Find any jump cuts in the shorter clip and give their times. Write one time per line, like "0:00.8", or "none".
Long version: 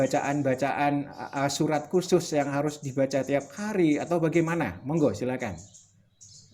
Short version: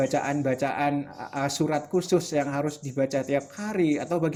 none